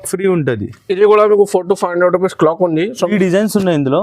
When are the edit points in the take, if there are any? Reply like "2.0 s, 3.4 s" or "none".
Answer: 3.1 s

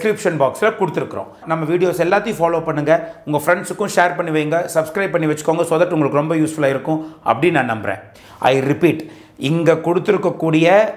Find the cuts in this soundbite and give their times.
1.4 s, 8.1 s

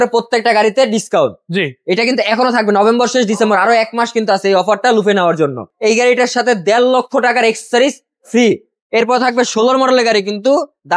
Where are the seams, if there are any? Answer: 5.7 s, 8.7 s

